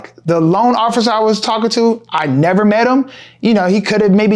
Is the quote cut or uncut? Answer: uncut